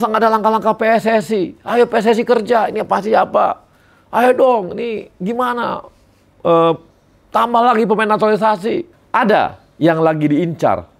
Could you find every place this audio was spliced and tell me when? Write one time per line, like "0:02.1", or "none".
0:08.9